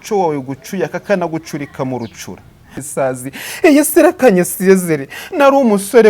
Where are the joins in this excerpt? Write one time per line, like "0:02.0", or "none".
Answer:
0:02.8